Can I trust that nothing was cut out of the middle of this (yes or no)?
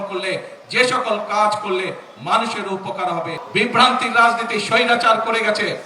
no